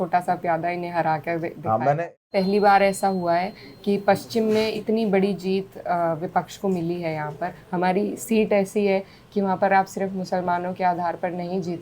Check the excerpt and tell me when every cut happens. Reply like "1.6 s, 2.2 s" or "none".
2.2 s, 4.8 s, 7.6 s

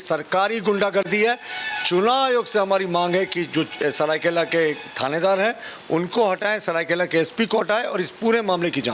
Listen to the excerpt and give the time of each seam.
none

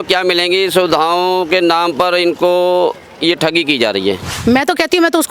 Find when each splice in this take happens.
4.3 s

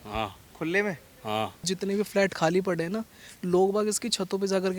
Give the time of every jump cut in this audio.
1.7 s

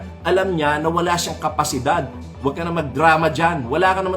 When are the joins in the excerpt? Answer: 2.2 s

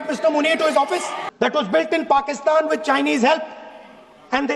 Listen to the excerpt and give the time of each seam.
1.2 s

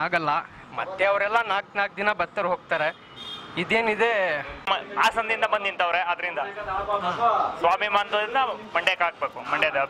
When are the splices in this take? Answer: 4.7 s

